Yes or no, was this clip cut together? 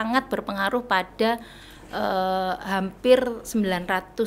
no